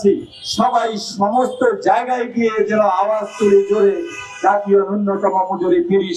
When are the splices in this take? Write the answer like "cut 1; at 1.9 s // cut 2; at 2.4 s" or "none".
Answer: none